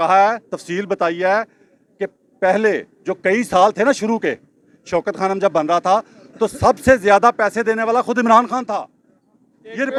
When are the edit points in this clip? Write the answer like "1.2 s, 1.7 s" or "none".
none

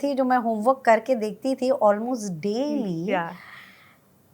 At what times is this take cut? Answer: none

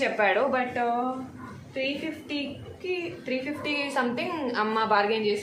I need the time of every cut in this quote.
none

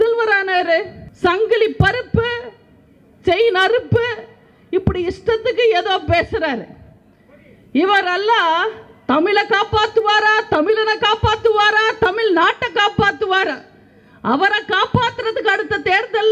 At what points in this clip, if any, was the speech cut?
1.0 s

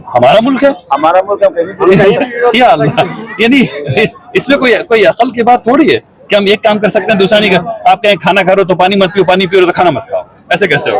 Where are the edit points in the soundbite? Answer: none

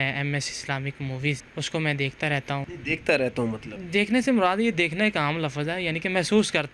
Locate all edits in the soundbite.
1.5 s, 2.7 s, 3.7 s

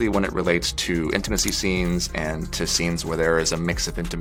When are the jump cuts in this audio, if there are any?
none

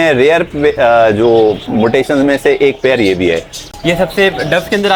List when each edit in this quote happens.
none

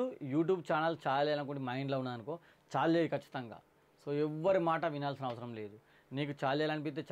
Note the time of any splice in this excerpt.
none

